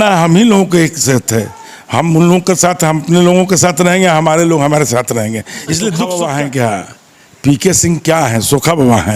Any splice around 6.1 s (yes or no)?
yes